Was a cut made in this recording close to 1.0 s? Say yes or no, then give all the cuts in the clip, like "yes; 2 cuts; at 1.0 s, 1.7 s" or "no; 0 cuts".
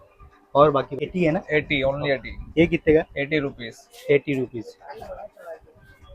yes; 1 cut; at 1.0 s